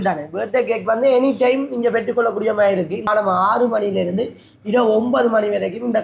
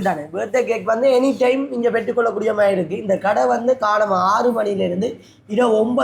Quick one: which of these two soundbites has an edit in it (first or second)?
first